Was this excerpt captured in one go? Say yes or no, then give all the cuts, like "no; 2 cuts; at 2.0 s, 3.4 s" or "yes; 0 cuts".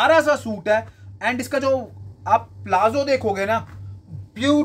yes; 0 cuts